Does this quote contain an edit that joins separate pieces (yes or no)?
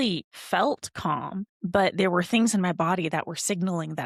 no